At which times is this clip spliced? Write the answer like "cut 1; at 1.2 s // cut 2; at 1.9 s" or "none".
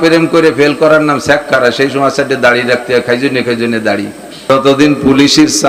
cut 1; at 4.5 s